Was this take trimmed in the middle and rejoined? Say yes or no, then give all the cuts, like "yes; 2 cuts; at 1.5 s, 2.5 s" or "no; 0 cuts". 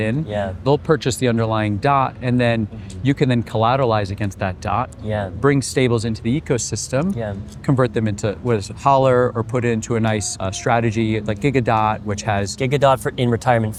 no; 0 cuts